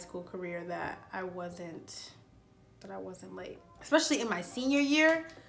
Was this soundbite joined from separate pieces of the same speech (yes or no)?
yes